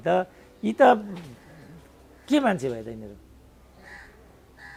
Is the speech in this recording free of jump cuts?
yes; 0 cuts

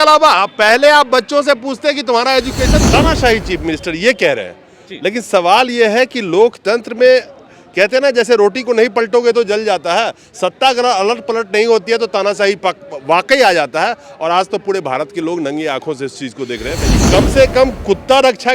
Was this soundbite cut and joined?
yes; 2 cuts; at 2.8 s, 16.9 s

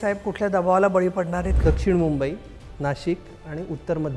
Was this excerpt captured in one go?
no; 1 cut; at 1.5 s

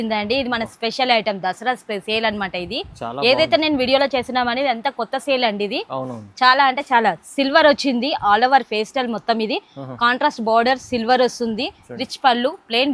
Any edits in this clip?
no; 0 cuts

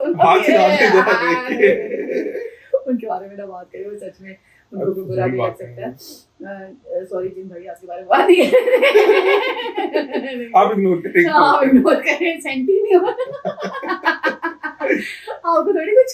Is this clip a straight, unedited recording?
yes; 0 cuts

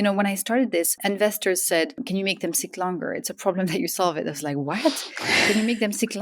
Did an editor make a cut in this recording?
yes; 2 cuts; at 1.0 s, 2.0 s

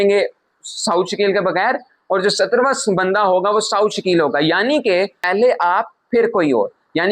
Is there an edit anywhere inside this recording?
yes; 1 cut; at 5.2 s

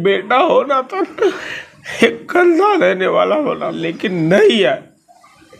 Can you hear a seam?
yes; 1 cut; at 4.2 s

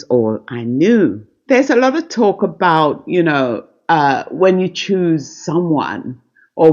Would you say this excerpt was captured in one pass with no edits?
no; 1 cut; at 1.3 s

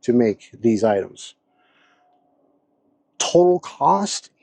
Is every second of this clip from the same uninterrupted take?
yes; 0 cuts

